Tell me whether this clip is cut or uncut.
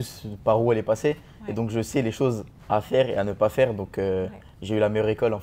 uncut